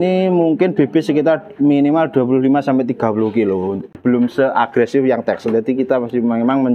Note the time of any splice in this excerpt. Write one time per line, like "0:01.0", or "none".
0:04.0